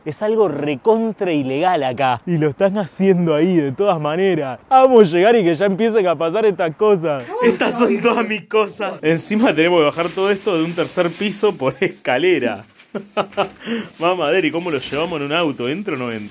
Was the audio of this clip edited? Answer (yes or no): no